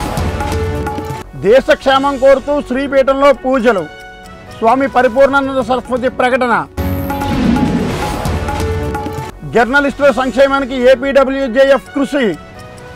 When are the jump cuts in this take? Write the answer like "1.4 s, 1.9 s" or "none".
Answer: none